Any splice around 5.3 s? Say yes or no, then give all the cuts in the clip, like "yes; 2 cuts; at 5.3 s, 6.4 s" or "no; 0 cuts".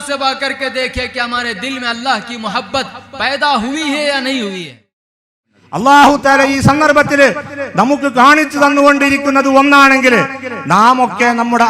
yes; 1 cut; at 5.3 s